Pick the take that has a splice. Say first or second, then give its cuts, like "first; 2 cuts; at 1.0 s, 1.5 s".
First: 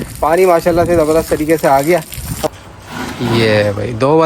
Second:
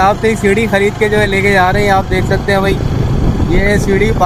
first; 1 cut; at 2.4 s